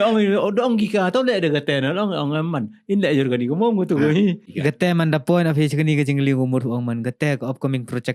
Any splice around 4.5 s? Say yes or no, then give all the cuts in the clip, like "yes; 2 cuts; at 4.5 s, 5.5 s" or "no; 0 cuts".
yes; 1 cut; at 4.5 s